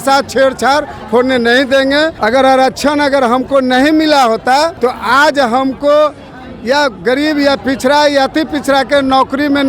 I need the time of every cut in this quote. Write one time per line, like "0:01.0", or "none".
0:02.2
0:04.7